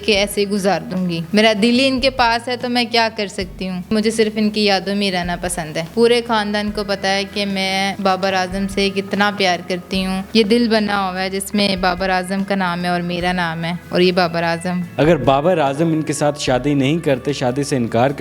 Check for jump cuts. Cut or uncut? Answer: cut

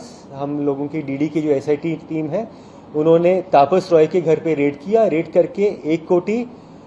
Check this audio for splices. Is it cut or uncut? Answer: uncut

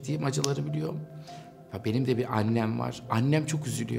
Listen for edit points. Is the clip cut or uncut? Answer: uncut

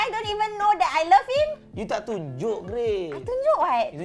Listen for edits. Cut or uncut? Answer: uncut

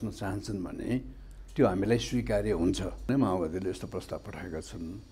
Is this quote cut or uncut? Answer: cut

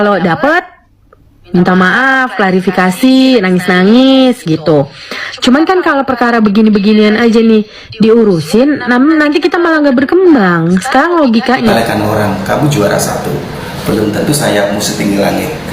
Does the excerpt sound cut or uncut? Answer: cut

